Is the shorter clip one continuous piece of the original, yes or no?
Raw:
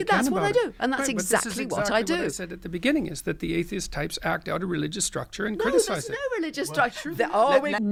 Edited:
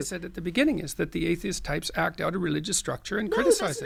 yes